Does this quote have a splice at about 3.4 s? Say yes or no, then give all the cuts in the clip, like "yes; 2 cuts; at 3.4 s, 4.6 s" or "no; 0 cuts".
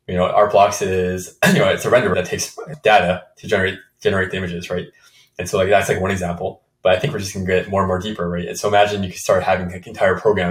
no; 1 cut; at 2.2 s